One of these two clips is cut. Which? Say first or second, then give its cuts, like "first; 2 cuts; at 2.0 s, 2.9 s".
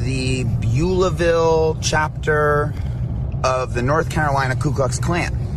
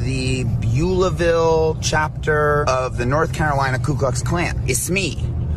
second; 2 cuts; at 2.6 s, 4.6 s